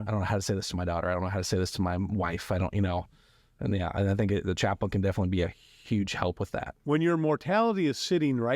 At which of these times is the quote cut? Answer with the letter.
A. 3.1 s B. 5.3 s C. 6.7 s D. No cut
C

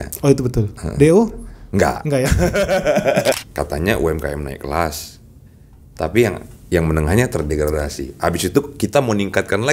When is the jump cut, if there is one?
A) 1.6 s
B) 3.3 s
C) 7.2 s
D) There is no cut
B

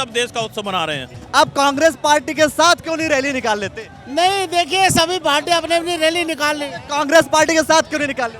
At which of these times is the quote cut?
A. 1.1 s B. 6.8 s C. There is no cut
A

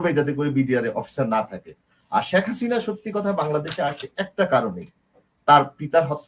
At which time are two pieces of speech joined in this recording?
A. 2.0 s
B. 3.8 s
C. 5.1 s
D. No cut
D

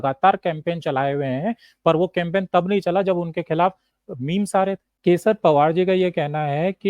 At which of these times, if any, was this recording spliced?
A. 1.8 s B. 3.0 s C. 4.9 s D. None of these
C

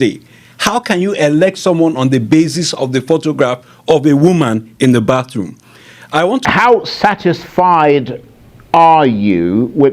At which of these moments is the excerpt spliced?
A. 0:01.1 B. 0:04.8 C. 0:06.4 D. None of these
C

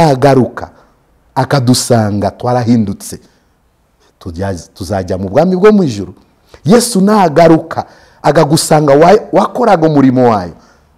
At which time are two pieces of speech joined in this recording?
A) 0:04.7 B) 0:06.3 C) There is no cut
C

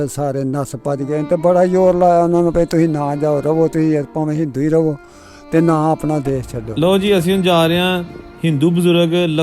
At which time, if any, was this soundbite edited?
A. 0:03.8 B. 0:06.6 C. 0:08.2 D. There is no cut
B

